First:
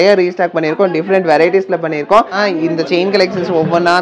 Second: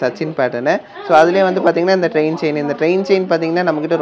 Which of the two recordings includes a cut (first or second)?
first